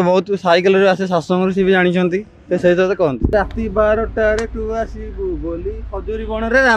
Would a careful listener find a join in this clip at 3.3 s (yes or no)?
yes